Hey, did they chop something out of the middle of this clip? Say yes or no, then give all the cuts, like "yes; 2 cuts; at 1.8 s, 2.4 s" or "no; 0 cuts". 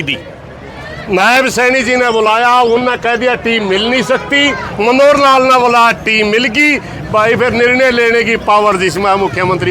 no; 0 cuts